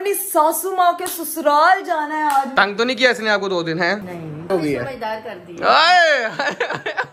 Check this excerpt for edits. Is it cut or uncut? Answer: cut